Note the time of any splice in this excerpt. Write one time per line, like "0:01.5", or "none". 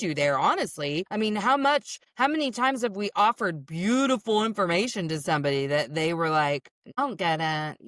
0:01.1
0:02.0
0:06.8